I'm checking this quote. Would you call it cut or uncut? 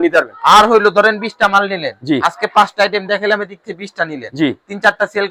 uncut